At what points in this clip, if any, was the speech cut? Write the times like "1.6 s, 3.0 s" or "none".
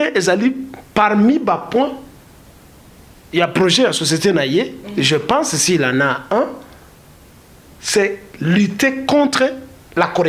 none